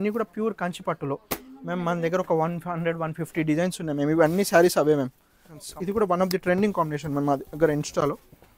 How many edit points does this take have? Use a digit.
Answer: 2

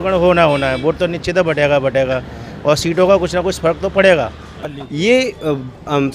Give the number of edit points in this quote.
1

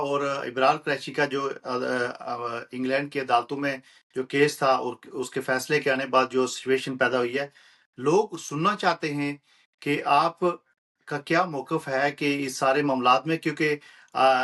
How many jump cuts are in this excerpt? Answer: 0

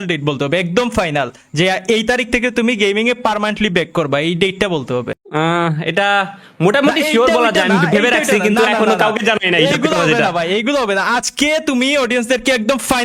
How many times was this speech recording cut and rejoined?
1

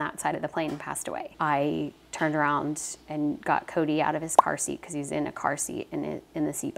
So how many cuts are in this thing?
2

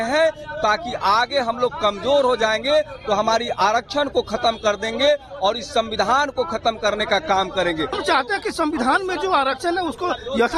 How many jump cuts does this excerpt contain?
1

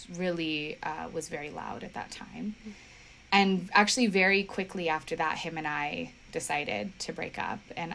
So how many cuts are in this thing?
0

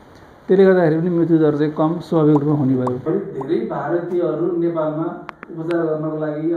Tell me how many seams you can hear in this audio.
1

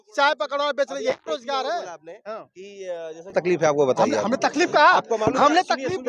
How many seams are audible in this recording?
1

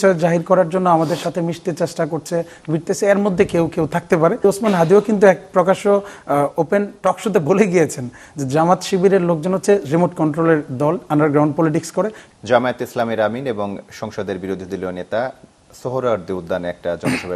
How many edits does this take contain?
2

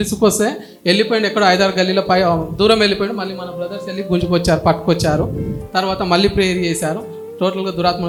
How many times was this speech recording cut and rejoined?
0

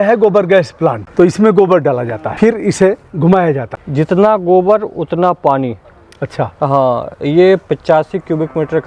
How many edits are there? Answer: 3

